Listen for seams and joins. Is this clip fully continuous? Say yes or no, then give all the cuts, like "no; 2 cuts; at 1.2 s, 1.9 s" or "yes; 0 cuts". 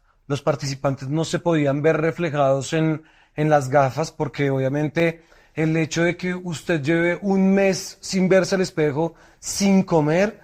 yes; 0 cuts